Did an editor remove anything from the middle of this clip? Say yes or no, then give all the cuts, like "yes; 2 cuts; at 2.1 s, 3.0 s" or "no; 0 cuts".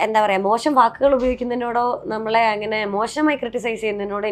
no; 0 cuts